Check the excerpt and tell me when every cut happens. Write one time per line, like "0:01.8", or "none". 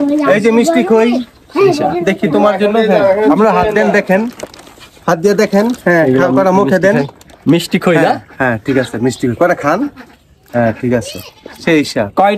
none